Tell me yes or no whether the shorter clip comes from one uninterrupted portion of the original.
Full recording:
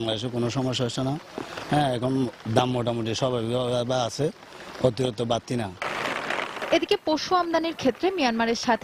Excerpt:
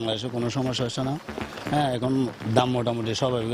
yes